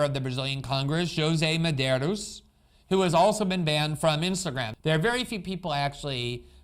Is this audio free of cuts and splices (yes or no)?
no